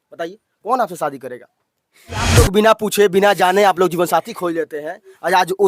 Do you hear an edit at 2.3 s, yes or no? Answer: yes